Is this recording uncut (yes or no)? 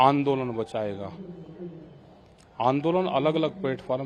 yes